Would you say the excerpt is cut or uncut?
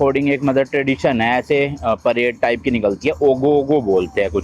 uncut